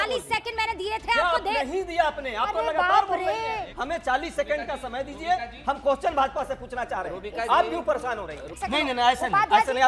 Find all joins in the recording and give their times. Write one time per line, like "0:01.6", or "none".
0:03.7
0:08.6